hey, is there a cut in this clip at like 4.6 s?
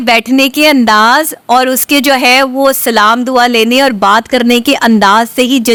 no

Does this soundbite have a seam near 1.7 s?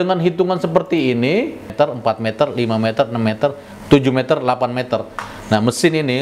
yes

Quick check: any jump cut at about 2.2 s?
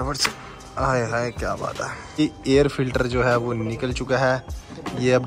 yes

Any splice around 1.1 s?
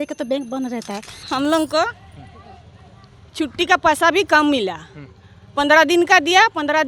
yes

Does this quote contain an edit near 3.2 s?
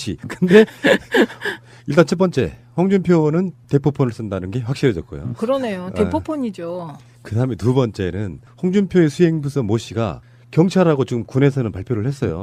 no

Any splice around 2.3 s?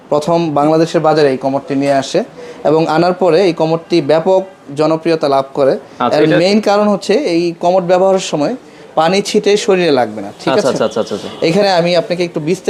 no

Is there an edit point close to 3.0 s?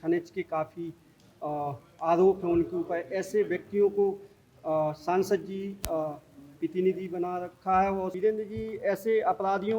no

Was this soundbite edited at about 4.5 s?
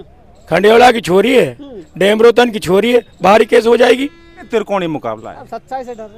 yes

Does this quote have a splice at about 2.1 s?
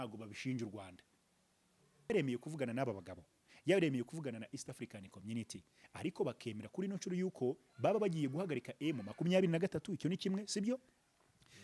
yes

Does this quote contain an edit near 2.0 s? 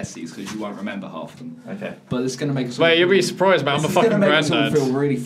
no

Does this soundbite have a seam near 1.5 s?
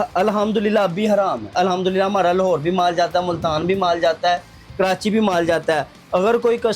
yes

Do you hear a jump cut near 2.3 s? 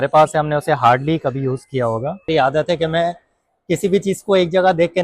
yes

